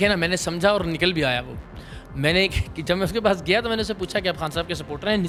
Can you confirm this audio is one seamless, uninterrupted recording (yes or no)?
yes